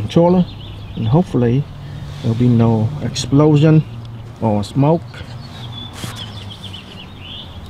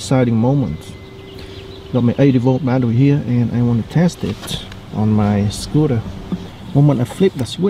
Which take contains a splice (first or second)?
second